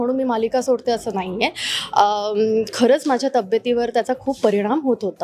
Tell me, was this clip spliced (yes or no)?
no